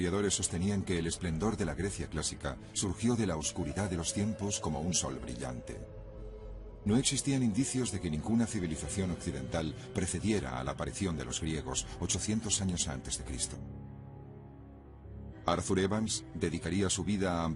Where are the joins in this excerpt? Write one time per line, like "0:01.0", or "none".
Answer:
none

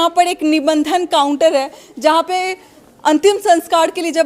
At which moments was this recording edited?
none

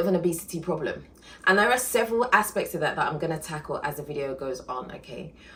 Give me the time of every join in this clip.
none

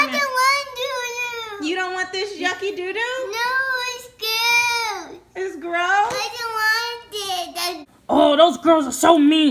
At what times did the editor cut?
0:07.8

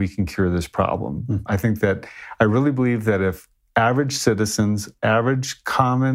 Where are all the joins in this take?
none

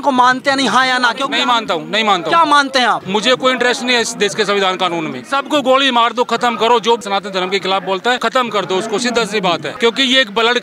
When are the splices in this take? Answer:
0:01.2
0:03.0
0:05.2
0:07.0
0:08.2
0:09.7

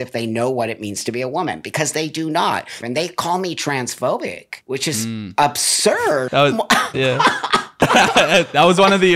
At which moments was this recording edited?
0:02.8
0:04.5
0:06.2
0:07.8

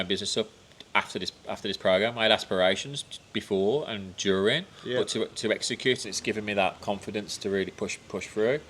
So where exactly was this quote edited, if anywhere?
0:06.0

